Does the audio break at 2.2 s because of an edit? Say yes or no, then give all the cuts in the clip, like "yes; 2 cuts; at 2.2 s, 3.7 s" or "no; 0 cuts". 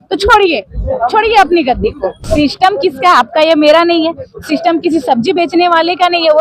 yes; 1 cut; at 2.2 s